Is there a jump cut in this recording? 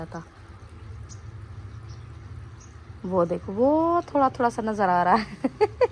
no; 0 cuts

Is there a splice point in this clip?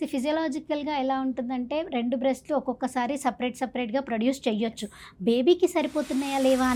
no; 0 cuts

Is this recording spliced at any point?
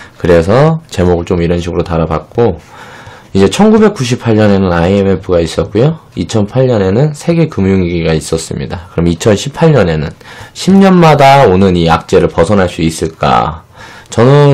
no; 0 cuts

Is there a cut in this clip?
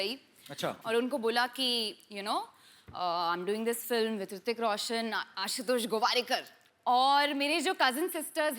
no; 0 cuts

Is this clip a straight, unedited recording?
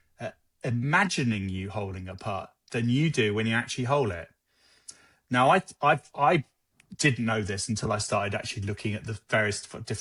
yes; 0 cuts

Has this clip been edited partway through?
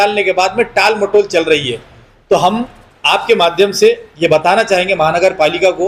no; 0 cuts

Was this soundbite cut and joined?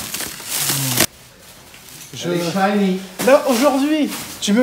yes; 1 cut; at 1.0 s

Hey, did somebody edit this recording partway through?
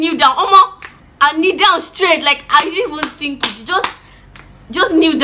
no; 0 cuts

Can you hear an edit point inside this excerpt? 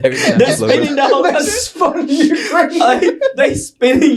no; 0 cuts

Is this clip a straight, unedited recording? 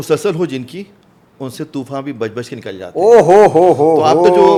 yes; 0 cuts

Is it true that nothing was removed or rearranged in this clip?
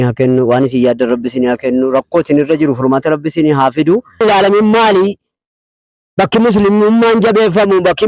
no; 1 cut; at 4.2 s

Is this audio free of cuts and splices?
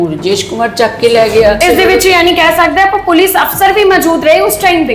no; 1 cut; at 1.6 s

